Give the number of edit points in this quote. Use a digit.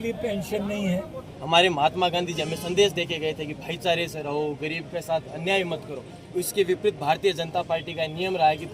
1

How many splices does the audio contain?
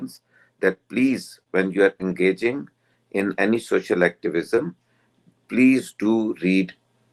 0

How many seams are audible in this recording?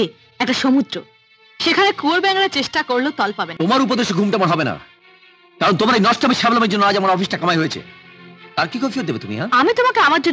1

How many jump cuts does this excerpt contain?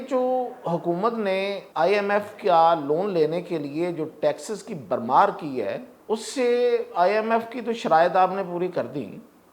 2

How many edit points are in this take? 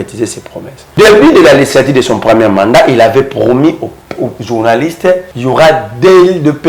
2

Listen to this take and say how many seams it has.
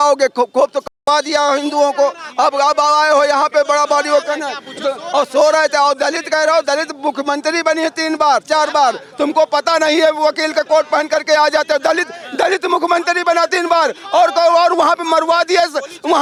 0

